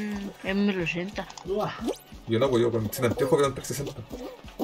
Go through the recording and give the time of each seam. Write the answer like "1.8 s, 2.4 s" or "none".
none

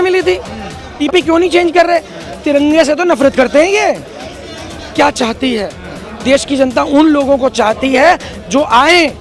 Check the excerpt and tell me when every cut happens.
1.0 s, 4.9 s

